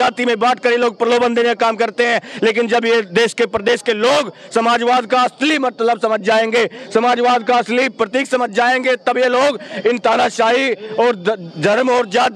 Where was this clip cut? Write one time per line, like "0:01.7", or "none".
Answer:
none

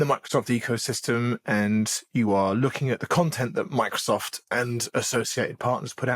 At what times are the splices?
none

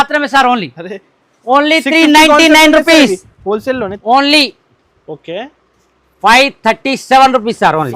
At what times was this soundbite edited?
0:03.9

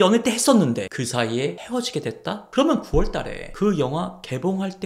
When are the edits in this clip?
0:00.9

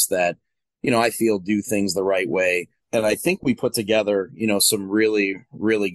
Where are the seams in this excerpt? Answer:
0:02.7

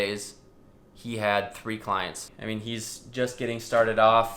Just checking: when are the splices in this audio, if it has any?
0:02.3

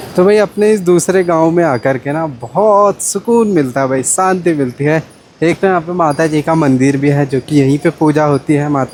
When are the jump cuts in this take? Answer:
none

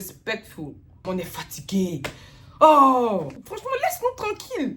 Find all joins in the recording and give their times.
0:01.0
0:03.6

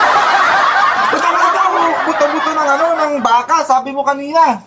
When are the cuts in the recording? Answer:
0:01.5

